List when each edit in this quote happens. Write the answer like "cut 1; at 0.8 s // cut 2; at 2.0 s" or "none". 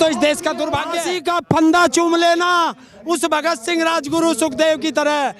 cut 1; at 1.1 s